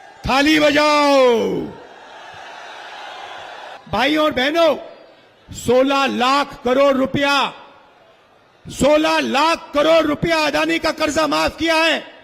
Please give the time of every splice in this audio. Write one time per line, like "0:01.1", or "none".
0:03.8